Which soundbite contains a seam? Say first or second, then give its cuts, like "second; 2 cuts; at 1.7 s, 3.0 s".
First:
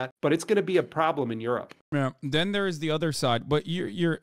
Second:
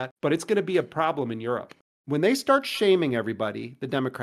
second; 1 cut; at 1.8 s